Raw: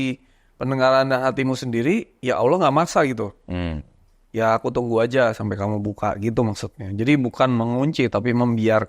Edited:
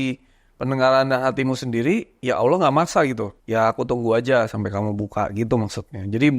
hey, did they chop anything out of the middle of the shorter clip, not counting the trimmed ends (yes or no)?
yes